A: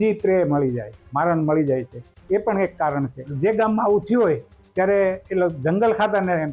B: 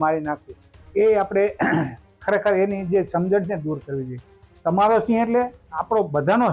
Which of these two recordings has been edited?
A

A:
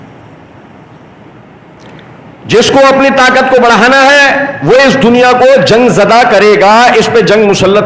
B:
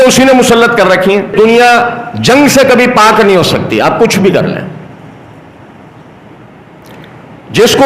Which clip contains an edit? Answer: B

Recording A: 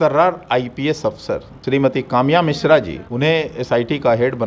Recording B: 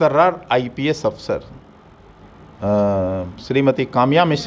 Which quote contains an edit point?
A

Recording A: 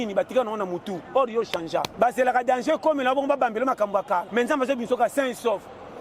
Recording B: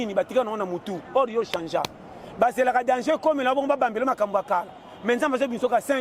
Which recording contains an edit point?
A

